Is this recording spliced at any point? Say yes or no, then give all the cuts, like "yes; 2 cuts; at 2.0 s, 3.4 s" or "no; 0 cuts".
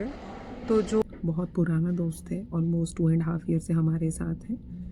yes; 1 cut; at 1.0 s